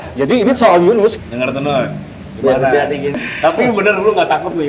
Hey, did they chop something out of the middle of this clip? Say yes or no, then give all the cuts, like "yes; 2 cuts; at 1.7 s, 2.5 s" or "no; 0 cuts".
yes; 2 cuts; at 1.2 s, 3.1 s